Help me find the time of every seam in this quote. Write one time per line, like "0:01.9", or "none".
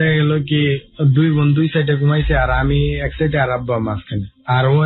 none